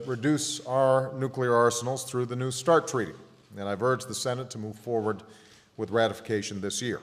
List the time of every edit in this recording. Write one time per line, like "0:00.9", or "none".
0:01.1